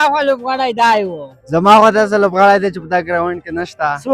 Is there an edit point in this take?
yes; 1 cut; at 1.4 s

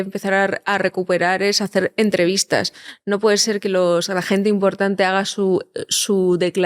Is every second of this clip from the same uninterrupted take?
yes; 0 cuts

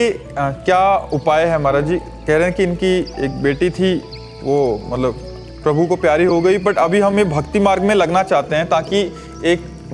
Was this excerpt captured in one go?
yes; 0 cuts

